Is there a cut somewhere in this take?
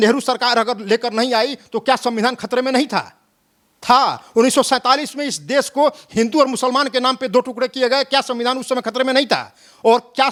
no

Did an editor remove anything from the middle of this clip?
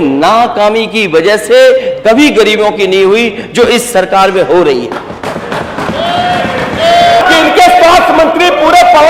yes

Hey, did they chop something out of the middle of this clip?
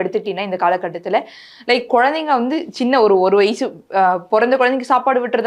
no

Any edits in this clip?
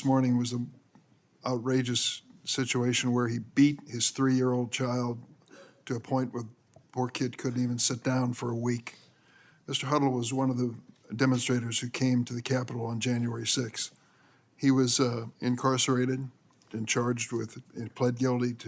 yes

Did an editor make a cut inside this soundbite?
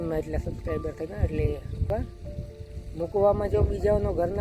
yes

